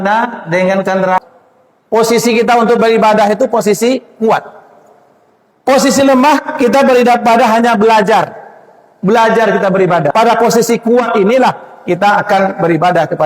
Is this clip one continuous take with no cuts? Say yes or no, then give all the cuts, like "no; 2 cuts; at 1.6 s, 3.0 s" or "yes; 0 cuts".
no; 2 cuts; at 1.2 s, 10.1 s